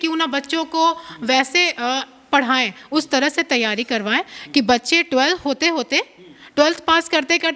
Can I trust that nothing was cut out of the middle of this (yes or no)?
yes